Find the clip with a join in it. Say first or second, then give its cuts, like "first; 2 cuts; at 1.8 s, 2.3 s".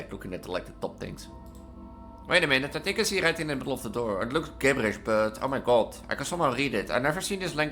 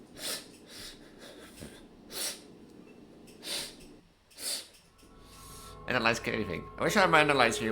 second; 1 cut; at 5.3 s